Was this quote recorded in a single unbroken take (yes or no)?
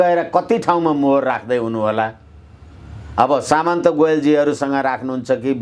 yes